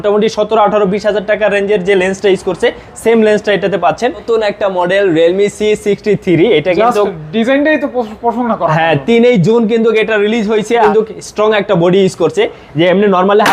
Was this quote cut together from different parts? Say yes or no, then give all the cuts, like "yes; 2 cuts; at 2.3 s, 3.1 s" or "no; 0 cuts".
yes; 2 cuts; at 4.2 s, 10.8 s